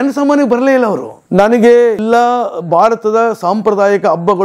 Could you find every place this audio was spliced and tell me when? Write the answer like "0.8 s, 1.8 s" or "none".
1.1 s, 2.0 s